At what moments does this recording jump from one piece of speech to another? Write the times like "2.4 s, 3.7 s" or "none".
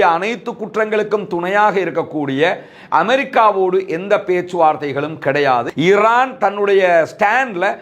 5.7 s